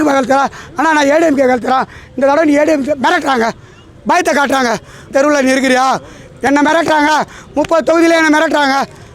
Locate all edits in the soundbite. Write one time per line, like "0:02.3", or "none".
0:05.1